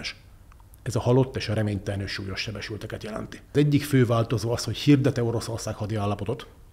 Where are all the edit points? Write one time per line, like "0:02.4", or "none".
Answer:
0:03.5